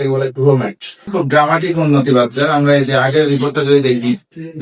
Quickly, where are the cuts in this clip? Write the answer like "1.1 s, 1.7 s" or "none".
1.1 s